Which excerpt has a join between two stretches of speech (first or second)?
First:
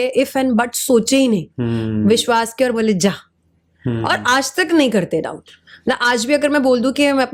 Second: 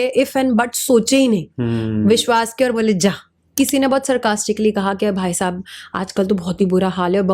second